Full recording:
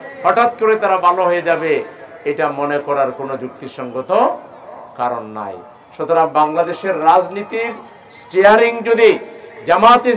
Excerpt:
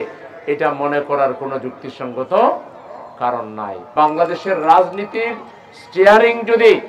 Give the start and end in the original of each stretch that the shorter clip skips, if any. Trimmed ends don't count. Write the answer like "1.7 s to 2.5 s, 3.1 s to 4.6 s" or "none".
5.7 s to 6.3 s